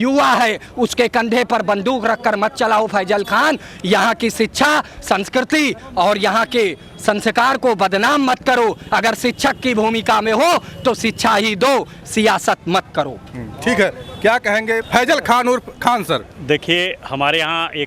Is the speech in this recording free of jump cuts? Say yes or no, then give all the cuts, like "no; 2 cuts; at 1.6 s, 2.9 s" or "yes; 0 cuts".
yes; 0 cuts